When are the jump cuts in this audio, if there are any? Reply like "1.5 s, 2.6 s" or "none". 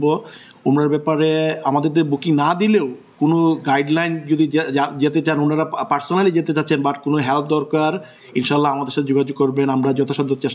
none